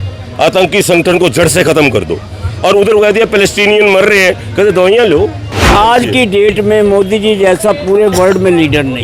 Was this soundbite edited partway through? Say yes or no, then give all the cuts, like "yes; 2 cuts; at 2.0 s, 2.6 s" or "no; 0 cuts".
yes; 1 cut; at 5.7 s